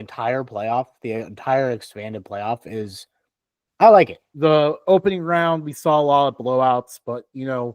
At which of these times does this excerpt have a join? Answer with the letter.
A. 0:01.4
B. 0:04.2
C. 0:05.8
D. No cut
B